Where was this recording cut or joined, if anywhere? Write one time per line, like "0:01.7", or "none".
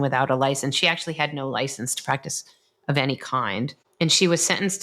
0:03.8